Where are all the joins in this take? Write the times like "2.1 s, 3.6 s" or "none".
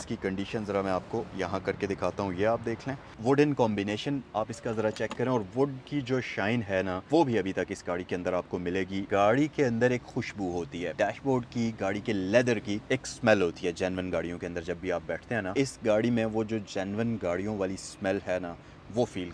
3.1 s, 9.1 s, 10.9 s, 15.5 s